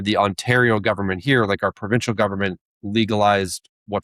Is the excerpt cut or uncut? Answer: uncut